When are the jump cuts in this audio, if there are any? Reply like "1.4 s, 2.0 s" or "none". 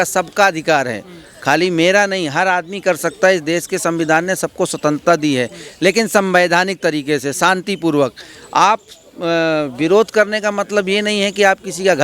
none